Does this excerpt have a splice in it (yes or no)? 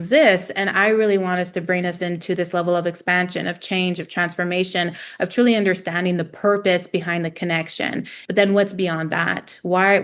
yes